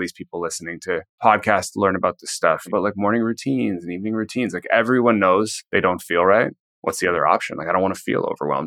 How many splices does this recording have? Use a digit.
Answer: 4